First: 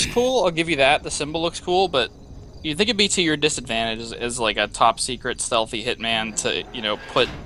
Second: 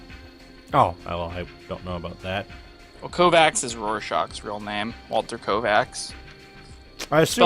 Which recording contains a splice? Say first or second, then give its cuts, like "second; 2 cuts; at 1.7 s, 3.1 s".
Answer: second; 1 cut; at 3.6 s